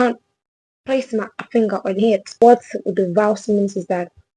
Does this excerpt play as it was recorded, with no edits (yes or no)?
no